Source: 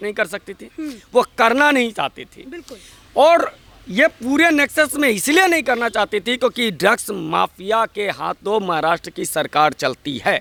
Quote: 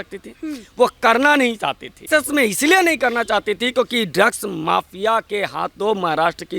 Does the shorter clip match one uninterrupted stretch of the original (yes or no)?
no